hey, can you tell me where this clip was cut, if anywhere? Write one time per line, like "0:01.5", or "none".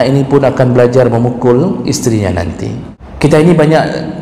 0:03.0

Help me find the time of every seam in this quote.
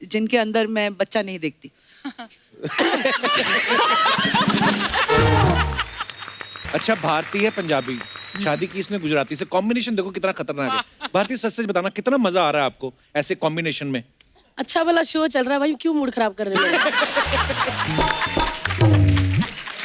0:06.5

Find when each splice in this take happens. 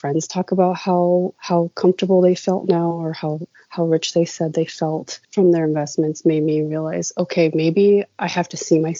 none

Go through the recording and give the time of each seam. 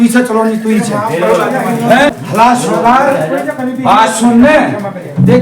0:02.2

